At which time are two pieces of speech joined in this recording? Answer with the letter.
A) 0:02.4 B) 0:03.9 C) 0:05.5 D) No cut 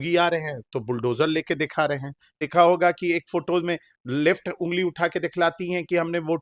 A